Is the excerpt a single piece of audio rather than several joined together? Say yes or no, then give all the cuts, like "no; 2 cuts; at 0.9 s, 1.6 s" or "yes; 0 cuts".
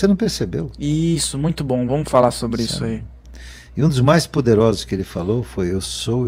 yes; 0 cuts